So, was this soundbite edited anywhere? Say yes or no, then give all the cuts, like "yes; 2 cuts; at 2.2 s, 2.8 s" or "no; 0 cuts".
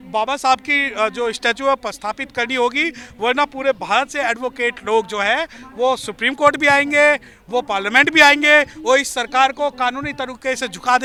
no; 0 cuts